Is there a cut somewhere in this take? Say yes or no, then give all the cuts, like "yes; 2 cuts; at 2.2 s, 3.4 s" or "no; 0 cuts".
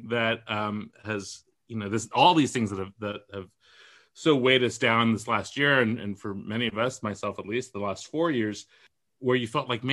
yes; 1 cut; at 8.9 s